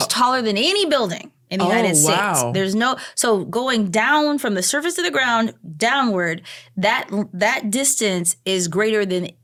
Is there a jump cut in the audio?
no; 0 cuts

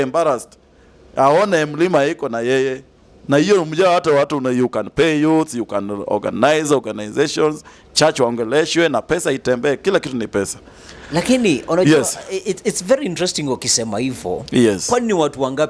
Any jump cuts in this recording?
no; 0 cuts

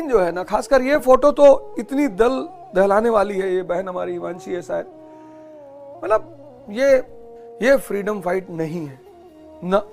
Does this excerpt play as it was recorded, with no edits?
yes; 0 cuts

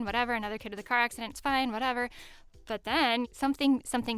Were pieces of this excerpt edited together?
yes; 1 cut; at 3.3 s

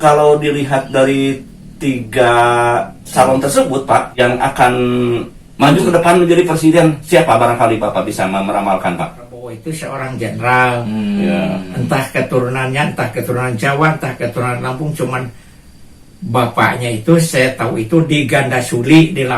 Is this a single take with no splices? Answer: no; 2 cuts; at 4.1 s, 9.7 s

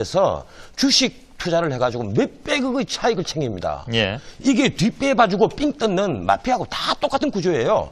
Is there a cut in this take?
yes; 1 cut; at 1.5 s

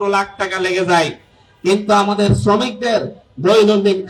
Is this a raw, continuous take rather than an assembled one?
yes; 0 cuts

